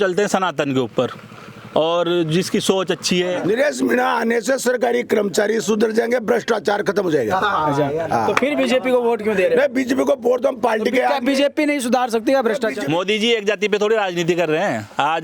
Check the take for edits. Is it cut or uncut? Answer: cut